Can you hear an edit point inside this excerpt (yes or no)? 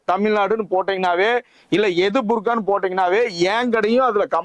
no